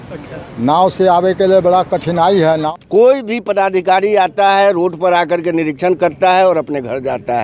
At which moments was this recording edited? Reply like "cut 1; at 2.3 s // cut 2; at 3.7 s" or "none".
cut 1; at 2.6 s